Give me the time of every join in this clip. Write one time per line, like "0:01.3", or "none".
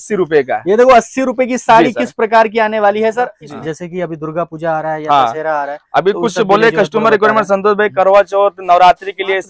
0:03.4